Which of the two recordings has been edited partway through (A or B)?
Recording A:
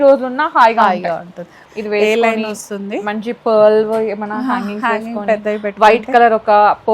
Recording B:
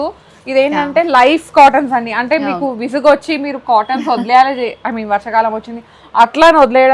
A